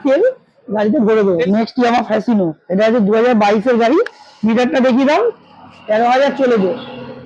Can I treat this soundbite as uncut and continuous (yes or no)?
no